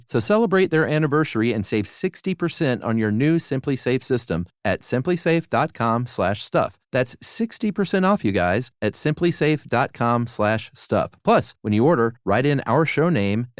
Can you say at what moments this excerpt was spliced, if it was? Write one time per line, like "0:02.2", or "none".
none